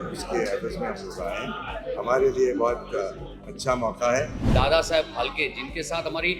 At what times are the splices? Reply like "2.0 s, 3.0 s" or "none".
4.5 s